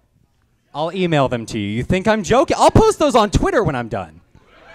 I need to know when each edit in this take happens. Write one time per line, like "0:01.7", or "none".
0:03.4